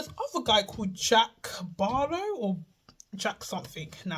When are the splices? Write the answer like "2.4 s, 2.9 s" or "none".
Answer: none

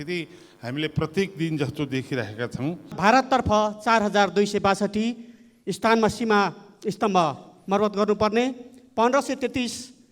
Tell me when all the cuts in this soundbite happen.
3.0 s

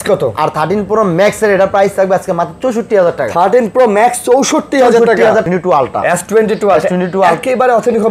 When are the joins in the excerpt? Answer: 5.5 s

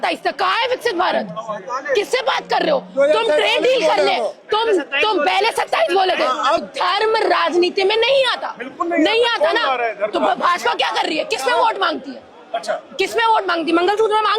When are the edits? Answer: 6.6 s

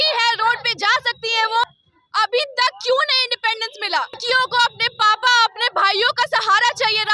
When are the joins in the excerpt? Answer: 1.7 s, 4.2 s

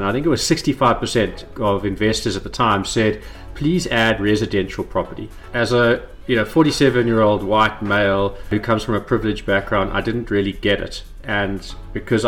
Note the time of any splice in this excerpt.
8.5 s

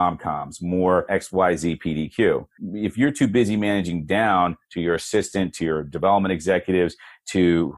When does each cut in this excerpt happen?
1.1 s, 2.6 s

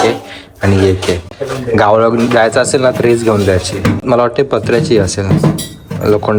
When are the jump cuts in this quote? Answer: none

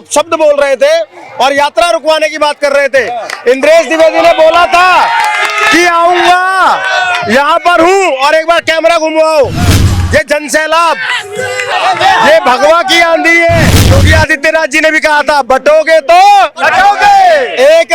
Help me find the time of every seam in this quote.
11.7 s, 14.0 s

